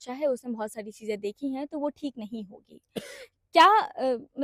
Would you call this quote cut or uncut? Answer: uncut